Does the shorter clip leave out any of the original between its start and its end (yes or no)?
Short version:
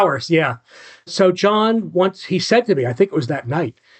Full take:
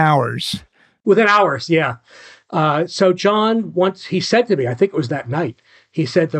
yes